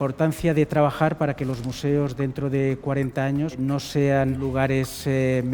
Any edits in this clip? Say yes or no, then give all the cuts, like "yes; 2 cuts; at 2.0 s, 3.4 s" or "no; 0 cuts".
yes; 2 cuts; at 3.5 s, 4.4 s